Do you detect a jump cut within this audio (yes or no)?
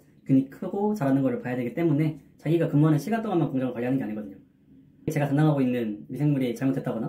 yes